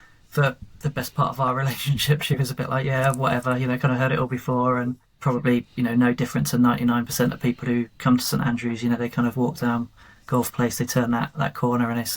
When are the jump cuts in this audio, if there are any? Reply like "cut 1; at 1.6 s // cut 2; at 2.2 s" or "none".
cut 1; at 5.1 s